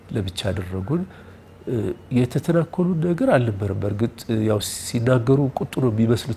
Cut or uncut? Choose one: uncut